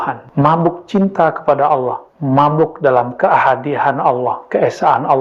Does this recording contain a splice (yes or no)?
no